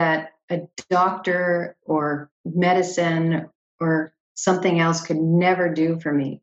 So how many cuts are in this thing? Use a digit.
0